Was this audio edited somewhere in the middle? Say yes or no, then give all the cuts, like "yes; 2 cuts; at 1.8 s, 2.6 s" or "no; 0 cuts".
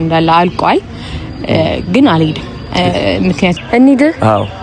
yes; 1 cut; at 3.5 s